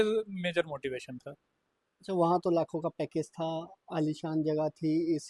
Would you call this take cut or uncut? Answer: uncut